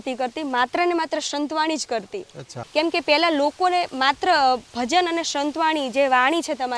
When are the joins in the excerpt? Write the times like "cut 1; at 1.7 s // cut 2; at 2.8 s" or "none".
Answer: cut 1; at 2.5 s